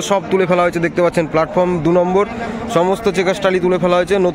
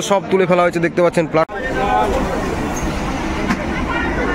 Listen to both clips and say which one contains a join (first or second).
second